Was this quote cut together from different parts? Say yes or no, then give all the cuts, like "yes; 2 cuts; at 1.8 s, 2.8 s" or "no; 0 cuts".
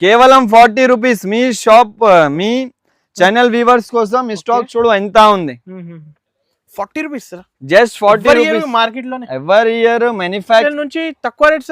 yes; 1 cut; at 10.6 s